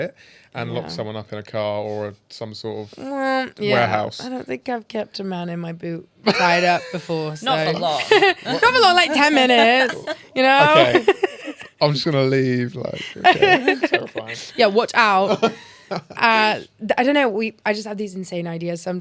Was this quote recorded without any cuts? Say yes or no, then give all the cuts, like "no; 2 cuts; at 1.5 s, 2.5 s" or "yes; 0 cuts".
yes; 0 cuts